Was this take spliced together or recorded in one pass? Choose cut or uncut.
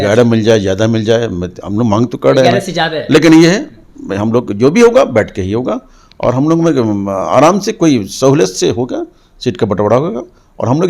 uncut